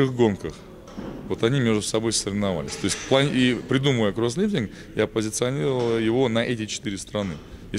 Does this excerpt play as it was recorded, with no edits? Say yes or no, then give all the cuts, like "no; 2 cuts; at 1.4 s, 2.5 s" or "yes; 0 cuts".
yes; 0 cuts